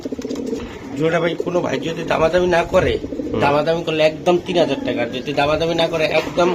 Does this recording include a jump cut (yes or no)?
no